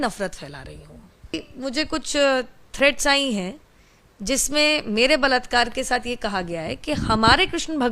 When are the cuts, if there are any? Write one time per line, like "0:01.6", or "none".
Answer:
0:01.5